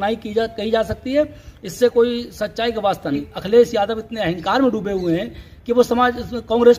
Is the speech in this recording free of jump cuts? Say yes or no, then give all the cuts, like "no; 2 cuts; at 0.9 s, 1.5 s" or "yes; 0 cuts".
no; 1 cut; at 3.2 s